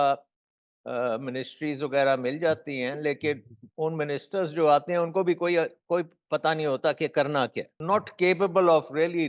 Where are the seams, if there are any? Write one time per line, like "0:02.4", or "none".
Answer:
0:07.7